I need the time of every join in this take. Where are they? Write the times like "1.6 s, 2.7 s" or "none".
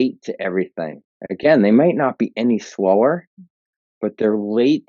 none